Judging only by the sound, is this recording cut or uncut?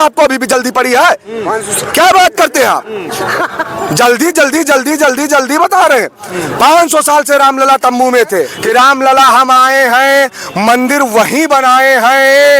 cut